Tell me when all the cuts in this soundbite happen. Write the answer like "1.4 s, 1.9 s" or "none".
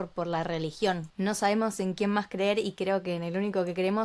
1.1 s

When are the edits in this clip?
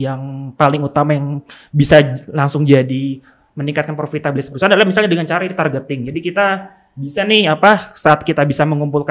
none

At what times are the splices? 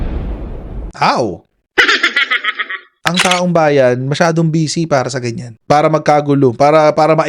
3.0 s

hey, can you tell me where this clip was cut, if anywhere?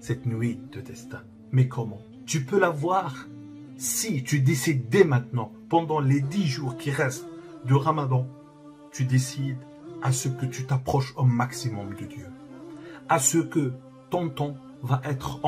2.1 s

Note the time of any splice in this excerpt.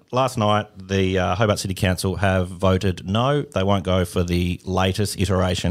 none

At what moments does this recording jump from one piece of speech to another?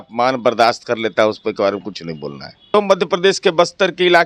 2.5 s

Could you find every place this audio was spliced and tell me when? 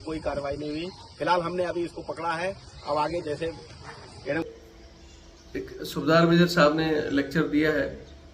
4.4 s

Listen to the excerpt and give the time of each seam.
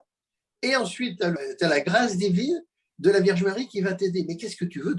1.3 s

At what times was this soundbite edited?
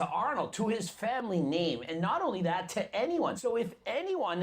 3.4 s

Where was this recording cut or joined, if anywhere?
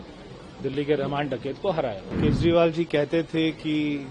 2.1 s

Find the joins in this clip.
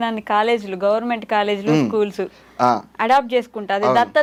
none

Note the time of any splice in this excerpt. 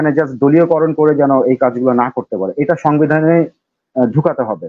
none

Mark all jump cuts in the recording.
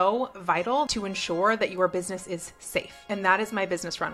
0.9 s, 3.0 s

